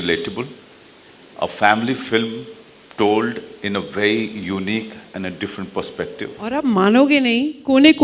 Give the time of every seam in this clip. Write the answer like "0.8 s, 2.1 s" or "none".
6.4 s